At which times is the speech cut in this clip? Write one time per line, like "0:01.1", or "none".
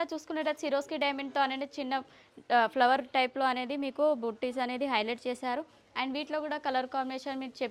none